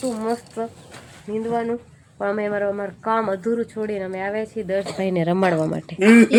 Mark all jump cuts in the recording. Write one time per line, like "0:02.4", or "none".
none